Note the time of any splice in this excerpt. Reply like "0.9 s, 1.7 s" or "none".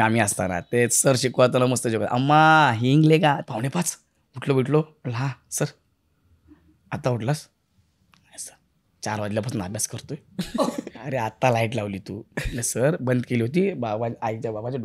3.4 s, 10.9 s